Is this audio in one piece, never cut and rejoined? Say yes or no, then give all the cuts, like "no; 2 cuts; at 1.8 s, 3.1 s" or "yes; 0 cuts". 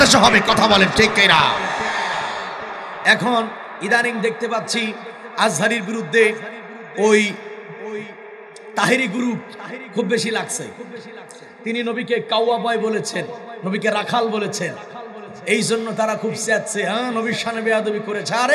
no; 1 cut; at 2.9 s